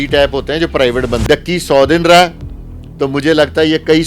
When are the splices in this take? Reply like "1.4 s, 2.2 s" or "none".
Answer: 1.2 s